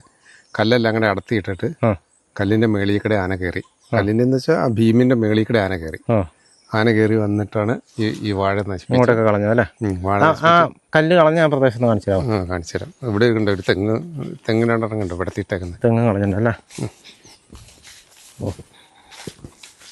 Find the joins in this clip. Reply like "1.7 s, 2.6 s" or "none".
none